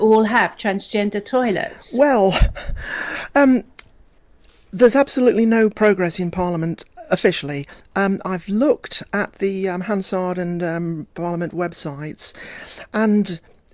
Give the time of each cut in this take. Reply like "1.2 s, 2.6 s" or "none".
none